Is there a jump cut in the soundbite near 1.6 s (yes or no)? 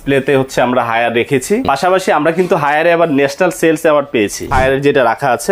yes